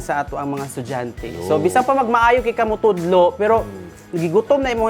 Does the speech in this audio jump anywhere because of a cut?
no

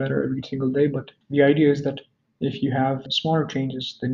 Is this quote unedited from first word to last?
no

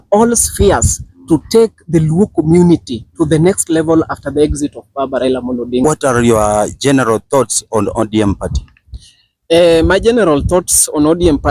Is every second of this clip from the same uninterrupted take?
no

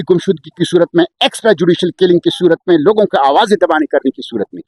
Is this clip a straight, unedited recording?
yes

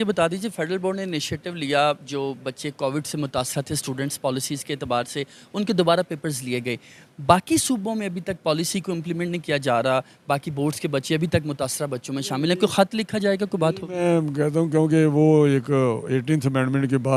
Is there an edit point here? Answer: no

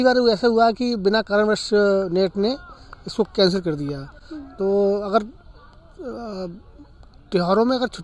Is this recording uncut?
yes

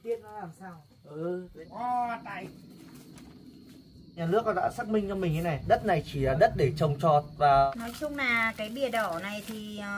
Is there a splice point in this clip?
yes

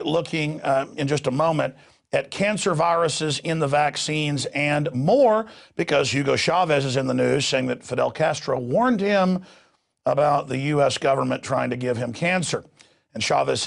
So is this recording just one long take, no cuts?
no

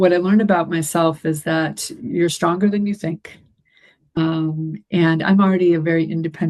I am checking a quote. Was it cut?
yes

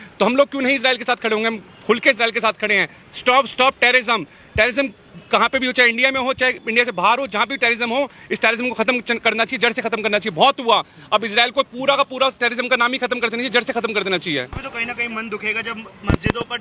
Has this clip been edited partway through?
no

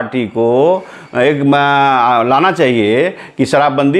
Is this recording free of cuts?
yes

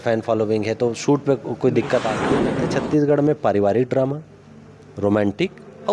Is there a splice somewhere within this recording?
yes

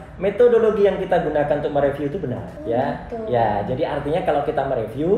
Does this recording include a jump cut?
yes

